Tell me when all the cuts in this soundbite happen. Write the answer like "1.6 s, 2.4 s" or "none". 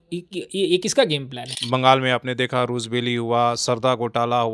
1.6 s